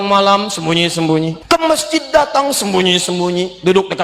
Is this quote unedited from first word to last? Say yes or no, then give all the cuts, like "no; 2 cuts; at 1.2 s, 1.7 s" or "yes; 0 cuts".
no; 1 cut; at 1.4 s